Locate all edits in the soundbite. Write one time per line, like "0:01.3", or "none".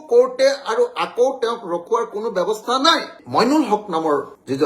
0:03.2

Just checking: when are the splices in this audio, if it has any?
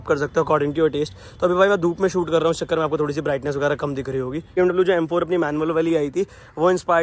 0:04.6

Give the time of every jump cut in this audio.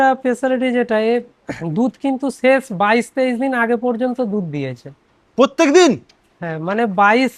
none

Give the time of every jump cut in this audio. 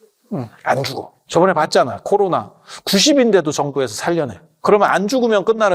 0:01.1
0:04.6

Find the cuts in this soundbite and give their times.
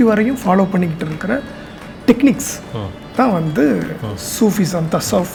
none

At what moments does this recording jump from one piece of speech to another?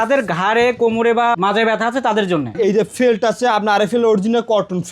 0:01.4
0:02.5

